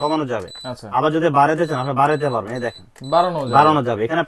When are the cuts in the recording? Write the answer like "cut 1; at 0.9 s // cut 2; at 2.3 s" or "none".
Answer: none